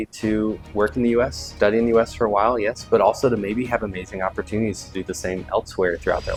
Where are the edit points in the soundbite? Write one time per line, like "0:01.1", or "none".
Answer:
none